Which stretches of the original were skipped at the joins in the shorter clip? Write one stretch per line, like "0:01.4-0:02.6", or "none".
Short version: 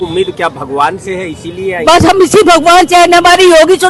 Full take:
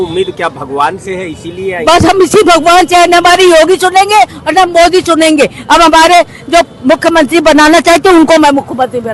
none